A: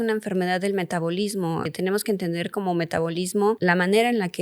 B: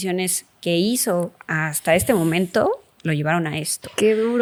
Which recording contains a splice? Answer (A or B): A